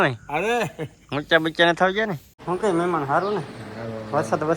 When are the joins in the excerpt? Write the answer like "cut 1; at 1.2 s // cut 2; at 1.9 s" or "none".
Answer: cut 1; at 2.3 s